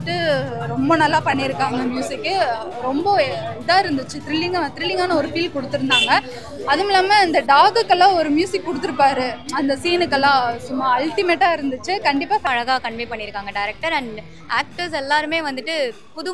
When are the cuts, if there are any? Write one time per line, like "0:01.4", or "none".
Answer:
0:12.5